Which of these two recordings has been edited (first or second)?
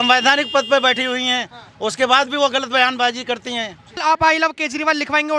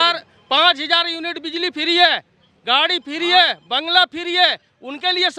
first